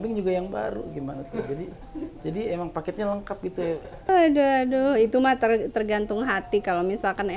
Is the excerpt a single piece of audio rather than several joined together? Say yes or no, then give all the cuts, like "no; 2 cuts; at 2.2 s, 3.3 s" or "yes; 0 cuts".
no; 1 cut; at 4.1 s